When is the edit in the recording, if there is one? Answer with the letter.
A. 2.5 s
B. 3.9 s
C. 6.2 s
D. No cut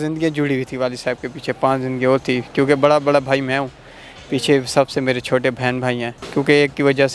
C